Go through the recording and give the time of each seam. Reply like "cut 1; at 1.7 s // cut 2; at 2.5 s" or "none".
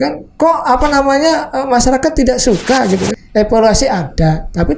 cut 1; at 3.2 s